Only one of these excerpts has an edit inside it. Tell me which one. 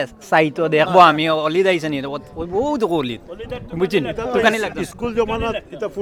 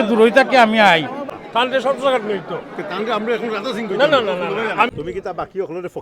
second; 2 cuts; at 1.3 s, 4.9 s

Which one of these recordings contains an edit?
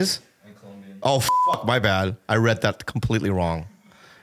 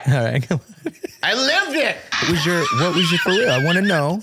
second; 1 cut; at 2.2 s

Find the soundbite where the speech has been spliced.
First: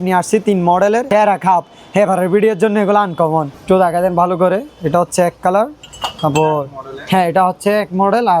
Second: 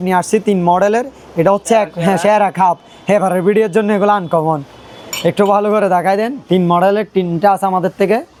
first; 2 cuts; at 1.1 s, 3.6 s

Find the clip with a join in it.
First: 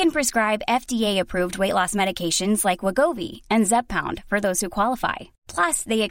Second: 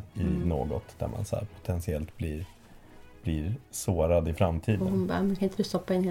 second; 1 cut; at 4.8 s

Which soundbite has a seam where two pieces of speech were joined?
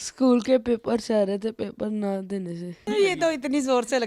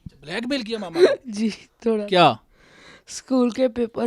first; 1 cut; at 2.8 s

